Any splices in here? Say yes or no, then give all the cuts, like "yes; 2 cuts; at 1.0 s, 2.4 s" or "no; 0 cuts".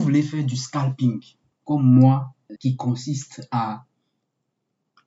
yes; 1 cut; at 2.4 s